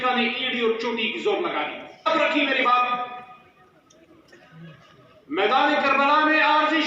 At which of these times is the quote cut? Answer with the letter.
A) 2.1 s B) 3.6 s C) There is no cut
A